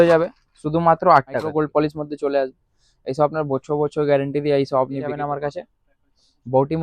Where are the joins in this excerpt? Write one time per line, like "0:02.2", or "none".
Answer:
0:01.5
0:05.2